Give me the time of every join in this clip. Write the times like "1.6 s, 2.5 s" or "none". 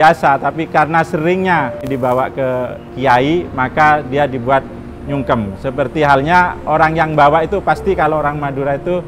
1.8 s